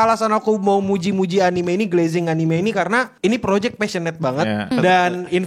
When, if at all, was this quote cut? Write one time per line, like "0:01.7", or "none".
0:03.1
0:04.7